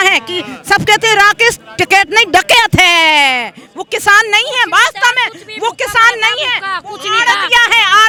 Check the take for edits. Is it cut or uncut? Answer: uncut